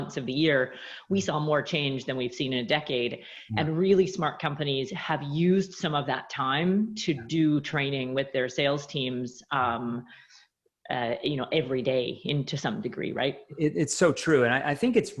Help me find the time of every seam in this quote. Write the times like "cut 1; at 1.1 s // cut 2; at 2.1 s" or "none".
none